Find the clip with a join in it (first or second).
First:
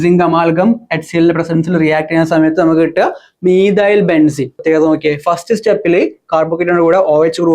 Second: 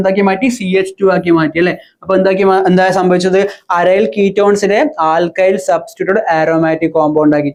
first